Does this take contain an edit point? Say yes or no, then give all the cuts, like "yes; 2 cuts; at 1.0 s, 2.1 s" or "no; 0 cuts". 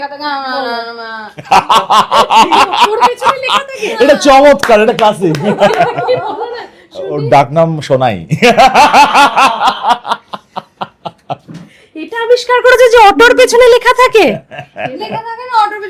no; 0 cuts